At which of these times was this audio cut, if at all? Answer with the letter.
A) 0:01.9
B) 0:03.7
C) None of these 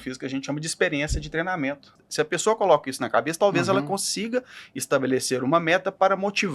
A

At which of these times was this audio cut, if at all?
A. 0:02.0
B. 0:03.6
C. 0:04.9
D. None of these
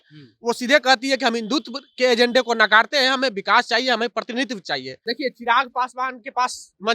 C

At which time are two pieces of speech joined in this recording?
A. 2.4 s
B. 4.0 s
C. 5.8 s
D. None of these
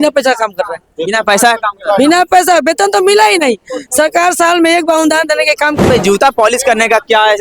C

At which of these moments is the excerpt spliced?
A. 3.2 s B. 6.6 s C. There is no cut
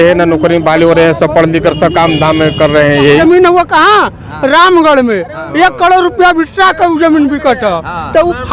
A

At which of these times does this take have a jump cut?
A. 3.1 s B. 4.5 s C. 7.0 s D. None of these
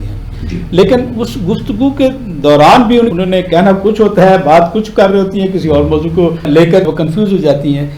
A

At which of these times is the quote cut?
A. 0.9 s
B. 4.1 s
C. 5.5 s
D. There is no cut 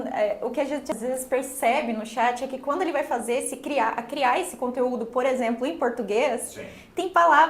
A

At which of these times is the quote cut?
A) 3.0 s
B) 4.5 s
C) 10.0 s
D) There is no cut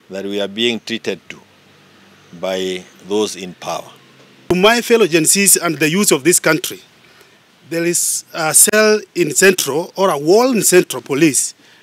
B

